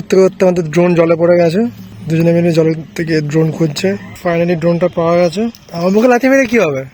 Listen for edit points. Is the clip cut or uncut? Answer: cut